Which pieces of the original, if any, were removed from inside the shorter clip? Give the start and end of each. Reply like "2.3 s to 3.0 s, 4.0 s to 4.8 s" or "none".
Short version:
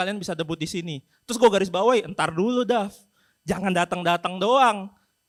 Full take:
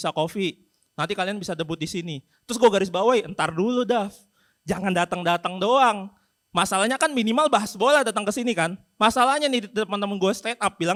none